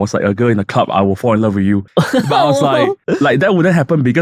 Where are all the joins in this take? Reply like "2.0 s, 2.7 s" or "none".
1.9 s, 3.0 s

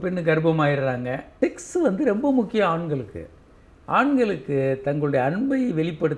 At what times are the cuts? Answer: 1.2 s

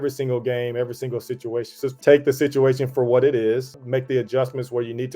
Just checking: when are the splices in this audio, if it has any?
2.0 s, 3.8 s

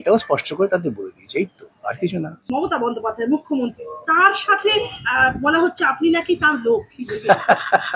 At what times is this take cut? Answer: 2.5 s

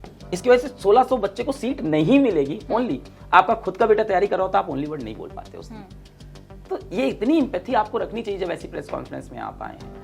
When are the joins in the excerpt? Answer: none

